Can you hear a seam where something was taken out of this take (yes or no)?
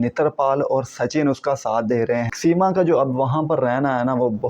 yes